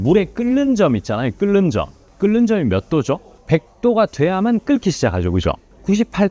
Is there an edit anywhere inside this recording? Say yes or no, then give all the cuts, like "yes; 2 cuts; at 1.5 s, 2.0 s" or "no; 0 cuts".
no; 0 cuts